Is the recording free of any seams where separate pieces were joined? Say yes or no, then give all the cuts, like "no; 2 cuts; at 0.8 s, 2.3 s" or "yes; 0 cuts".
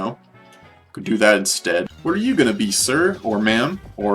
no; 1 cut; at 1.9 s